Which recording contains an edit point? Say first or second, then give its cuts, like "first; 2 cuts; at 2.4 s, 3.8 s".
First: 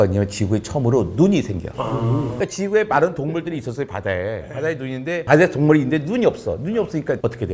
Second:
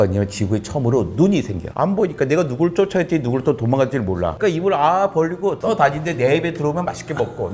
second; 3 cuts; at 1.6 s, 4.3 s, 5.6 s